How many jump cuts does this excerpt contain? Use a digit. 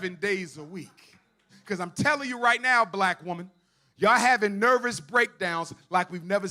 1